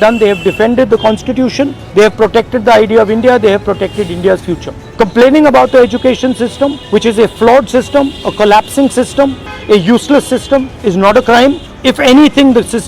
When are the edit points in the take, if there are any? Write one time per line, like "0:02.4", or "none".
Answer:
0:01.8
0:04.8
0:06.8
0:09.5
0:11.7